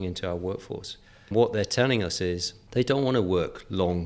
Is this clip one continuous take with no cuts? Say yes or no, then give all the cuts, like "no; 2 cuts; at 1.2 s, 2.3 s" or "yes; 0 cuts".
no; 2 cuts; at 1.3 s, 2.5 s